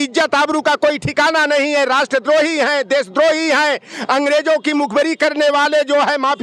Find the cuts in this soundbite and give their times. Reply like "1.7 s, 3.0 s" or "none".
none

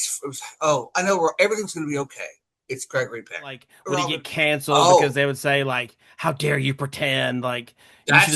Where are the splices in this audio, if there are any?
3.7 s

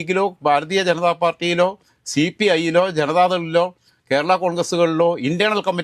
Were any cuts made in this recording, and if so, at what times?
none

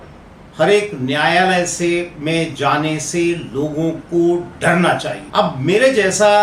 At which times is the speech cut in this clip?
5.2 s

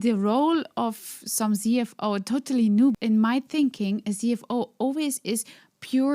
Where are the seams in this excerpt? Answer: 3.0 s

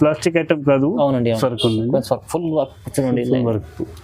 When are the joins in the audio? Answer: 1.4 s

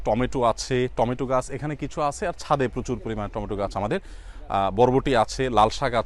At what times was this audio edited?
none

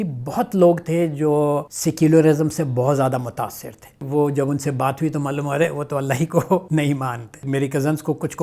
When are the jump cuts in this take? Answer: 1.8 s, 4.1 s, 7.3 s

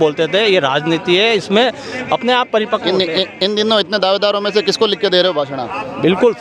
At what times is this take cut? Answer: none

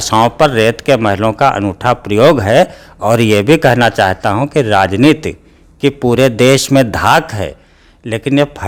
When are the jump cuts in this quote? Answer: none

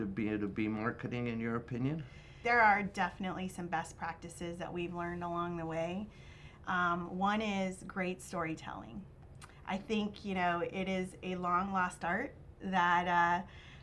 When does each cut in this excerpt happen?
2.3 s

